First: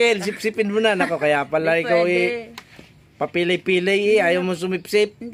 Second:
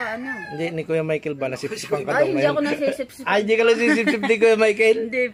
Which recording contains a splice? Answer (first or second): second